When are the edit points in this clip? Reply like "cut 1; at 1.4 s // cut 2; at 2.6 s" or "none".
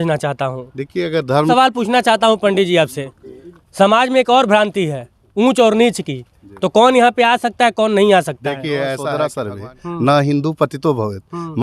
cut 1; at 1.5 s // cut 2; at 9.2 s